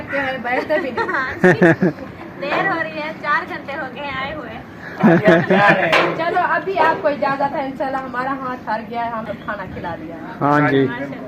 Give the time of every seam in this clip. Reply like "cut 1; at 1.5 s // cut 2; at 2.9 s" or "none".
cut 1; at 9.3 s